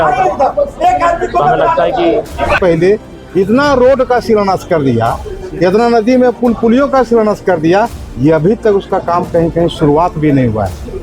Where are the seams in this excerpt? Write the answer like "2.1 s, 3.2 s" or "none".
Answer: 2.6 s